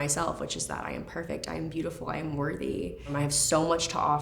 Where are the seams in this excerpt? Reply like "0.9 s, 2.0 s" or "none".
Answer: 3.1 s